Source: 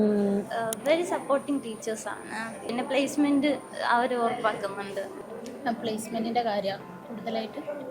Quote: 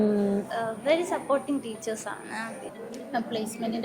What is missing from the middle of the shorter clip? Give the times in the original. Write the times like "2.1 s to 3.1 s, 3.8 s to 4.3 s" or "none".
2.6 s to 5.1 s